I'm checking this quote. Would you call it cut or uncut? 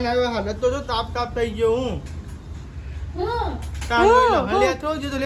uncut